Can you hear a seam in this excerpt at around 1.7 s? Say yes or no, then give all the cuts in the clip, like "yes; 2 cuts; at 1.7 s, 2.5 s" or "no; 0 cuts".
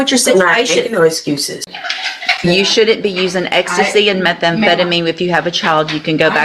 yes; 1 cut; at 1.7 s